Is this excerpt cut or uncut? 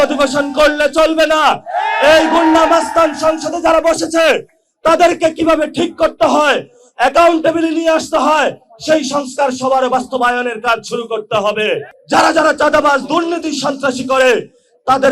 cut